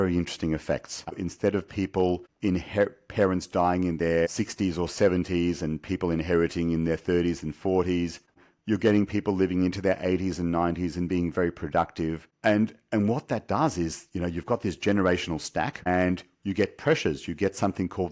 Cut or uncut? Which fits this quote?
cut